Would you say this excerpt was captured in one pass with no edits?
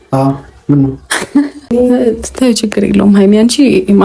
no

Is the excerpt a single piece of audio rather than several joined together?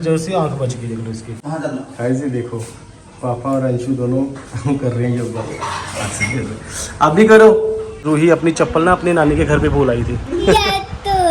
no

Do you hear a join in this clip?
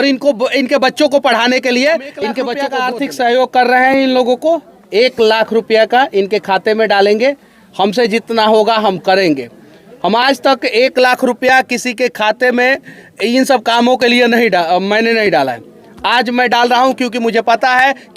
yes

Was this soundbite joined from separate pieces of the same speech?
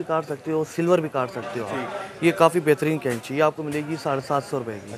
no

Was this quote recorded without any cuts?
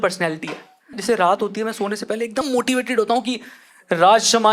no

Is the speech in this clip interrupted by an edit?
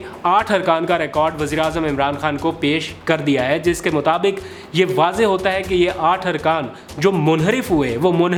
no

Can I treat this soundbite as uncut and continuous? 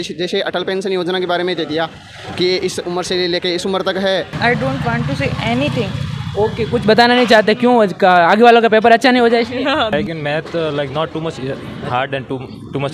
no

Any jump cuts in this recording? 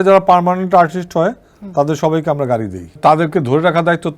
yes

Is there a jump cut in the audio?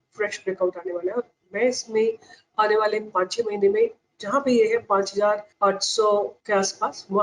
yes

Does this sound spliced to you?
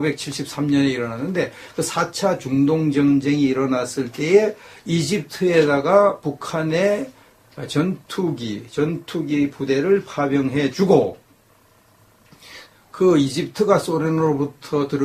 no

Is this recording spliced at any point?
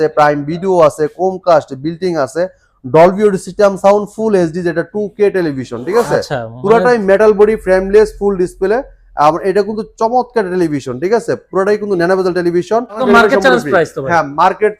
yes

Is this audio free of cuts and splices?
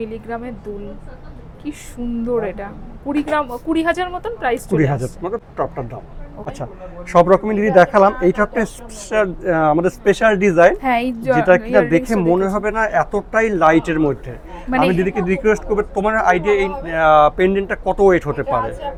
yes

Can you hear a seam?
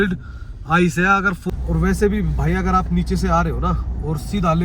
yes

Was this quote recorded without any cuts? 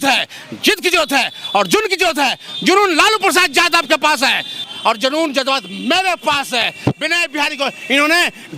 no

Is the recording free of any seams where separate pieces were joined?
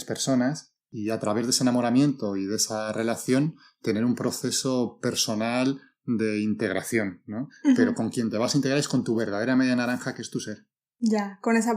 yes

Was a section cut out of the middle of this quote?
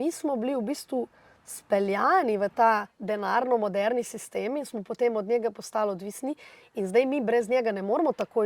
yes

